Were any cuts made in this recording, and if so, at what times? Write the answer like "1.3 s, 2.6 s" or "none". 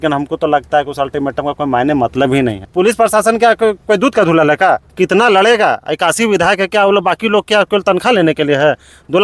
2.6 s, 4.9 s